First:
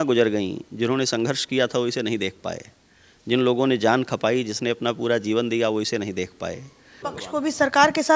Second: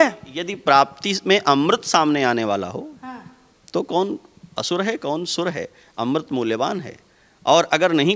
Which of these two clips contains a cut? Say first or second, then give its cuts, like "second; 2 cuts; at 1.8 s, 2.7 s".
first; 1 cut; at 6.9 s